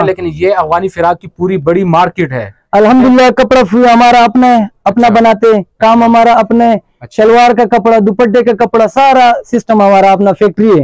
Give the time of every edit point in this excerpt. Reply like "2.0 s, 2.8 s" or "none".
none